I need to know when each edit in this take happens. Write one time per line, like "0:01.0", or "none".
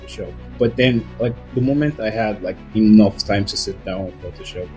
none